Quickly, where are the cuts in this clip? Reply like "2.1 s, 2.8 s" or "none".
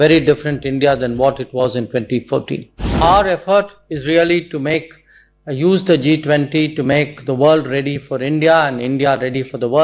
2.9 s